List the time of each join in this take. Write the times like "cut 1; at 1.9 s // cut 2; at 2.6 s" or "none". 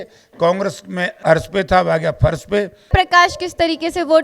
cut 1; at 1.1 s // cut 2; at 2.9 s